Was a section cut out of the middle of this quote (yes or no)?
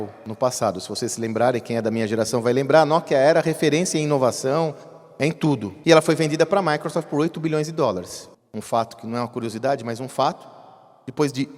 yes